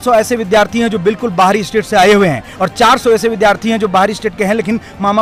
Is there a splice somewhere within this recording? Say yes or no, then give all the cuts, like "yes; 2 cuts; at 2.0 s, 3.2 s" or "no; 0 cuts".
no; 0 cuts